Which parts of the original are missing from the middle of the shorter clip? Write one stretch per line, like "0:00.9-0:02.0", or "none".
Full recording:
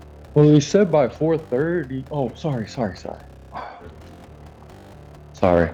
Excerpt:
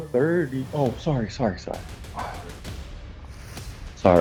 none